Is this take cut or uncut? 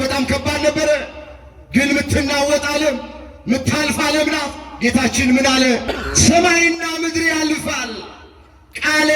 cut